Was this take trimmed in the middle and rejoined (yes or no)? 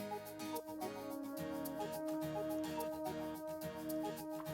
no